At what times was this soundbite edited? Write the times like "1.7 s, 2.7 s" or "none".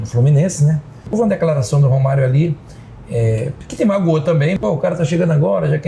1.1 s, 4.6 s